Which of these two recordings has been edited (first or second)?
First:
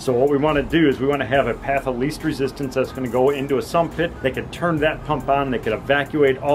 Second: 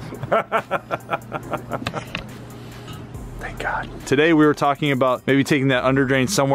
second